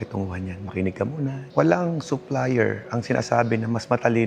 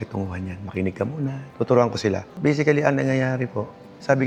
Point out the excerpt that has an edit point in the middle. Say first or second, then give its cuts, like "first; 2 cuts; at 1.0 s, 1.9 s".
first; 1 cut; at 1.4 s